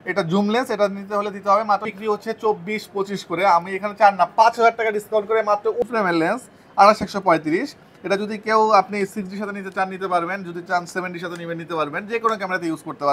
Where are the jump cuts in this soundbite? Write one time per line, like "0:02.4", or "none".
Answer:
0:01.9
0:05.8